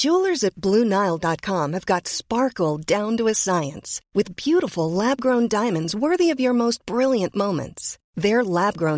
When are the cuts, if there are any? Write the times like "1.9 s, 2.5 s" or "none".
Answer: none

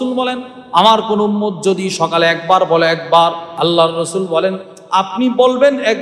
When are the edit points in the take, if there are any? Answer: 3.5 s

